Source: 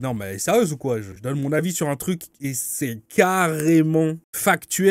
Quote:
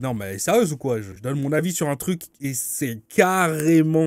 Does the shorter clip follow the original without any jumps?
yes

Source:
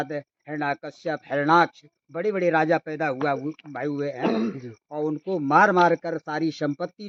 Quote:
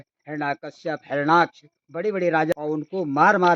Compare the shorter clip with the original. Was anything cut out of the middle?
yes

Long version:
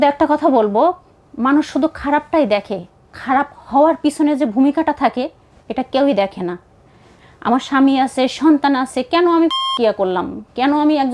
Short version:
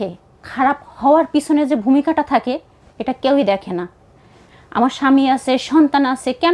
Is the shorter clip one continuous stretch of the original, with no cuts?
yes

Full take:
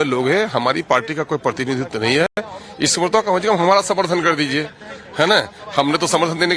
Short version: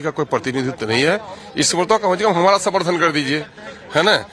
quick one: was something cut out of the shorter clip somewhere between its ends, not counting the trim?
yes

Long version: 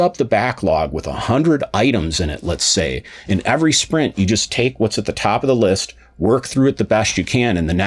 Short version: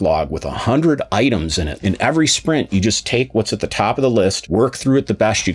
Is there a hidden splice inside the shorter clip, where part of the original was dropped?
yes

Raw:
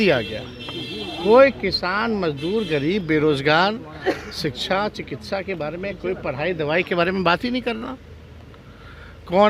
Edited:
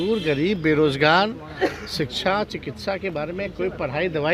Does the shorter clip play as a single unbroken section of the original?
yes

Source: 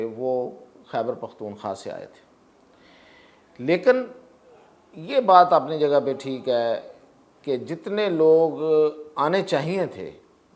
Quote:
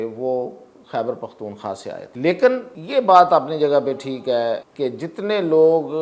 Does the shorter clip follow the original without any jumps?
no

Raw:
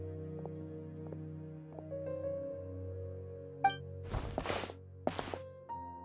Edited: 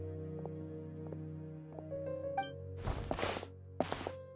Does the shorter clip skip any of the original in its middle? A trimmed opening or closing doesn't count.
yes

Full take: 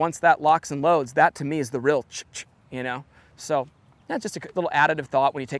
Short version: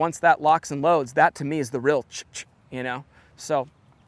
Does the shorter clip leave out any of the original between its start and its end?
no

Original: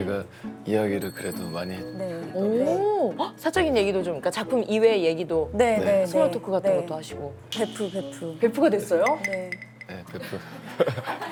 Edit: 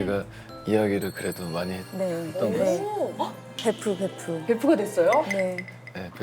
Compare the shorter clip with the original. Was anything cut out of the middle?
yes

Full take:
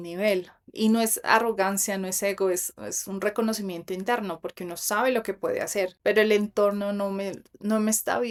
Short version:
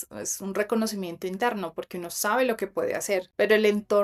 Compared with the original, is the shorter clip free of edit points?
yes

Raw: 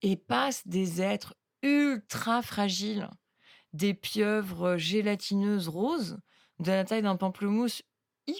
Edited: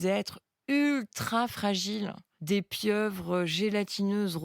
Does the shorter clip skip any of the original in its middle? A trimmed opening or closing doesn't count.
yes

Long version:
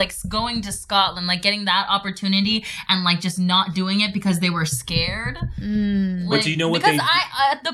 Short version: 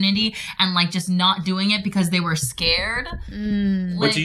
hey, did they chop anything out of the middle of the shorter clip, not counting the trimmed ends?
no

